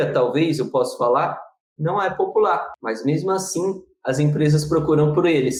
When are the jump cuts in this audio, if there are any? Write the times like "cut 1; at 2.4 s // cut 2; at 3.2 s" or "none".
none